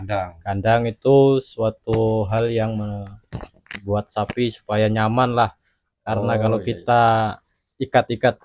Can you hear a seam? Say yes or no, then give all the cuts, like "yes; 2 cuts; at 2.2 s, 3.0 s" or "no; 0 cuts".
no; 0 cuts